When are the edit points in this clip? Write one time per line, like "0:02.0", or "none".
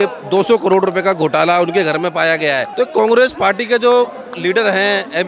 0:02.7